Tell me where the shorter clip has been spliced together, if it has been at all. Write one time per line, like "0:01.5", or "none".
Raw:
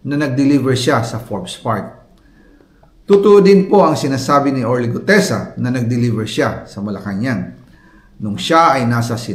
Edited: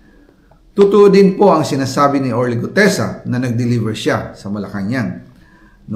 none